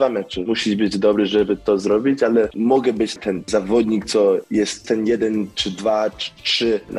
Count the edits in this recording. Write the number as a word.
one